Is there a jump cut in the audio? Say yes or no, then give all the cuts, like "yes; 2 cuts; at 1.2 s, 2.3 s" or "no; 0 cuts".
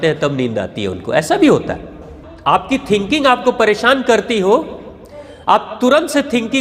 yes; 1 cut; at 2.2 s